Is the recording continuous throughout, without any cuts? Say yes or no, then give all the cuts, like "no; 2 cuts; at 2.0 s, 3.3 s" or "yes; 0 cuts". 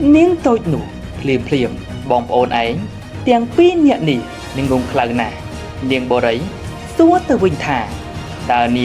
no; 1 cut; at 1.9 s